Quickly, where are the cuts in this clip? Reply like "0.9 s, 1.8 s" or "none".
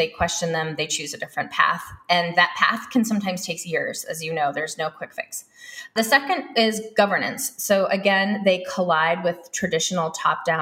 5.9 s